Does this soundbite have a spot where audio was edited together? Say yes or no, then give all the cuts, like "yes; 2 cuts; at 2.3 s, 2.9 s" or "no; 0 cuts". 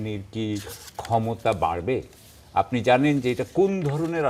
no; 0 cuts